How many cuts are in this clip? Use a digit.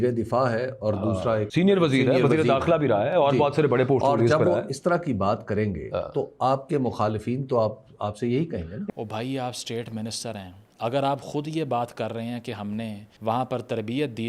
2